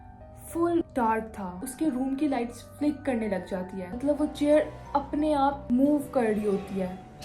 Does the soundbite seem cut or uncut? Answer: cut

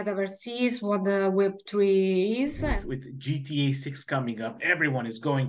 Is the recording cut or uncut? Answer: cut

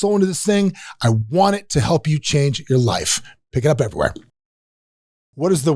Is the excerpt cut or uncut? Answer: cut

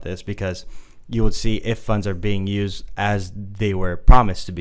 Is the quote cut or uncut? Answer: uncut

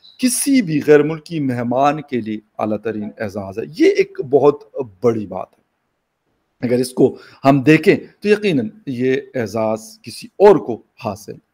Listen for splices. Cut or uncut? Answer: uncut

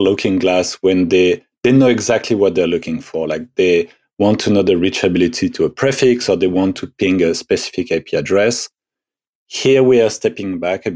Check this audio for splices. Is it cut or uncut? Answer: uncut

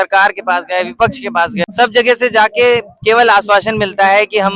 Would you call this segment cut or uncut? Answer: cut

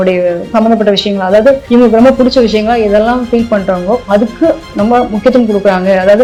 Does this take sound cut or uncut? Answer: uncut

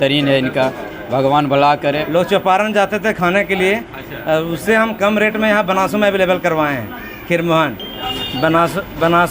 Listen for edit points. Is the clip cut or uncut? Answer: cut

